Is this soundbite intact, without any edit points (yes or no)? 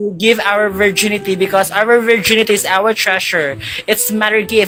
yes